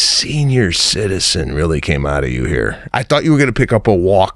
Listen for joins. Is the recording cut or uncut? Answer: cut